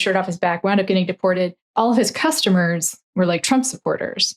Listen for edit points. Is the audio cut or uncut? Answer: uncut